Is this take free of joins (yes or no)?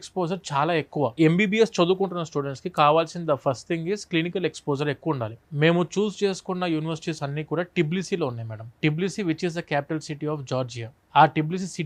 yes